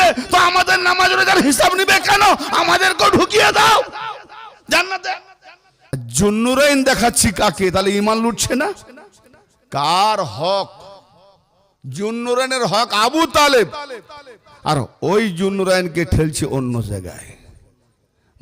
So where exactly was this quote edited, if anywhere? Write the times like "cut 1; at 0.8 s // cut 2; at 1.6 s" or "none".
cut 1; at 5.9 s